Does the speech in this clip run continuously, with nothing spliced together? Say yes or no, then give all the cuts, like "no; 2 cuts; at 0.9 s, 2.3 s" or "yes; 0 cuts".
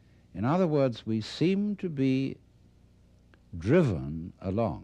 no; 1 cut; at 1.5 s